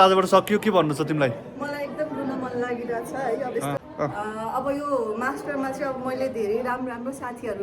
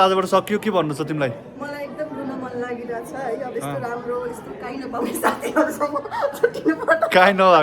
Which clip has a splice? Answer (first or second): first